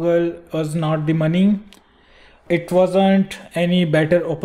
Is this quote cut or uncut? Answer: cut